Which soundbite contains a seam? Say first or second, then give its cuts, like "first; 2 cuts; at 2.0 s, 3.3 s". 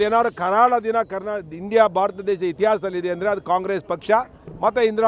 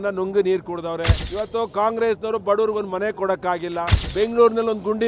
second; 2 cuts; at 1.2 s, 4.0 s